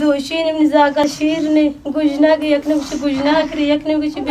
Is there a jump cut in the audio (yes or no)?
yes